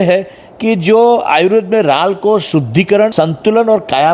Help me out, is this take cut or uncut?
cut